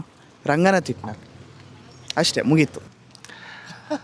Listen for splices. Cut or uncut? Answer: cut